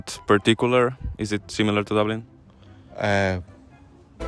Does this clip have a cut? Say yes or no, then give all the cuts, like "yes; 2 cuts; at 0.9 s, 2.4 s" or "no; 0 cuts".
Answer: no; 0 cuts